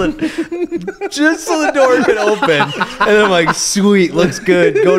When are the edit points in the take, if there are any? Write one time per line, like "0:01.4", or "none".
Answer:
none